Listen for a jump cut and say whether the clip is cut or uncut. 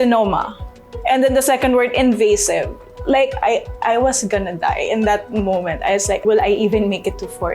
cut